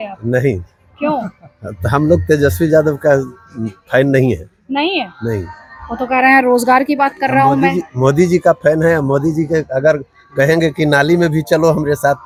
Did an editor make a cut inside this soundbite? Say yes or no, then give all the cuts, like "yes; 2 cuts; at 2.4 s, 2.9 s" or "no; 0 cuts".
no; 0 cuts